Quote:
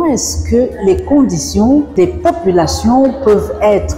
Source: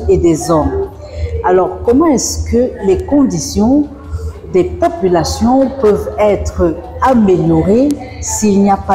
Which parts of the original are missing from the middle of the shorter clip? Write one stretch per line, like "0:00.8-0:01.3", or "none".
0:03.9-0:04.5